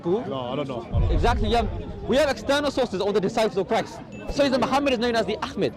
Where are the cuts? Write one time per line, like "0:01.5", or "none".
0:04.3